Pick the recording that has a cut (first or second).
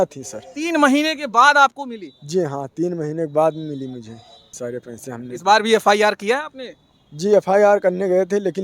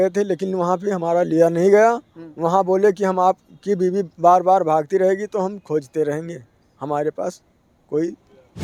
first